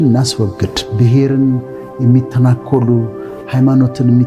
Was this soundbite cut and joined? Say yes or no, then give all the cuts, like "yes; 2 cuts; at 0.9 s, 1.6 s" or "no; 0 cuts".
no; 0 cuts